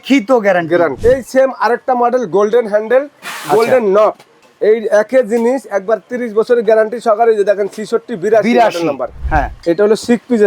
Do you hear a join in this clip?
yes; 3 cuts; at 1.0 s, 4.4 s, 9.2 s

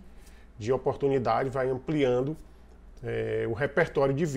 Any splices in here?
no; 0 cuts

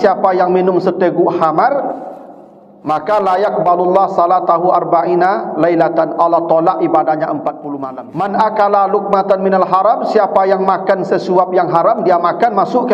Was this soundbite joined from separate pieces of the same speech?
yes; 1 cut; at 7.7 s

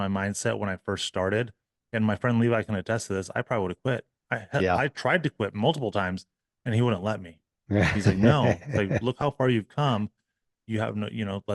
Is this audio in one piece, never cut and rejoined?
yes; 0 cuts

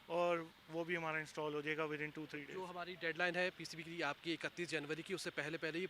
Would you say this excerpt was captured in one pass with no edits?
yes; 0 cuts

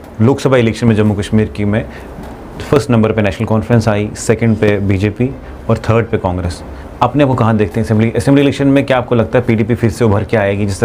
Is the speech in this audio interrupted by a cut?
no; 0 cuts

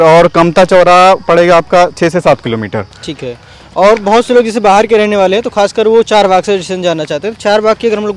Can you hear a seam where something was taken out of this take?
no; 0 cuts

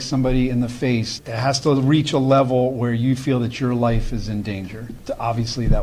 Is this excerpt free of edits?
no; 2 cuts; at 1.1 s, 4.9 s

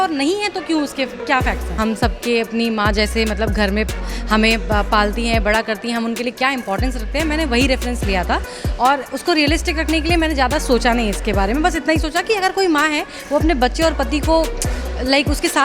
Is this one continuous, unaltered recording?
no; 1 cut; at 1.7 s

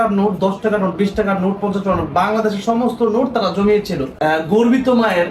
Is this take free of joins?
no; 1 cut; at 4.1 s

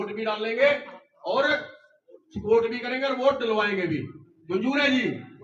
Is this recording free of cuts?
yes; 0 cuts

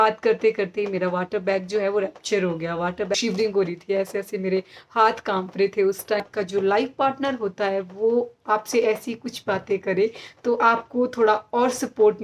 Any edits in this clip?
yes; 2 cuts; at 3.1 s, 6.2 s

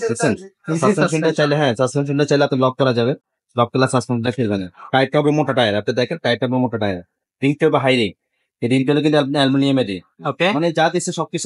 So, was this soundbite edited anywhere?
no; 0 cuts

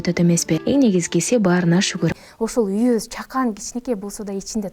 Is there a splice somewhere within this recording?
yes; 1 cut; at 2.2 s

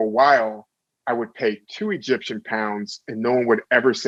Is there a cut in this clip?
no; 0 cuts

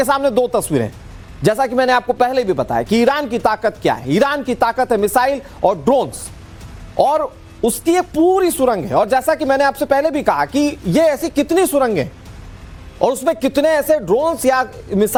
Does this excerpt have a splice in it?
no; 0 cuts

